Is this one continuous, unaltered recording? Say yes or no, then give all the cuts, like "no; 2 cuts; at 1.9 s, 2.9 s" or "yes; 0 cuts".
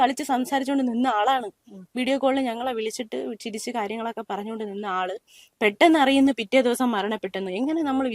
yes; 0 cuts